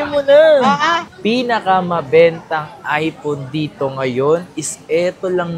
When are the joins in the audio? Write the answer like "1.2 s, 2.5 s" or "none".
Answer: 1.0 s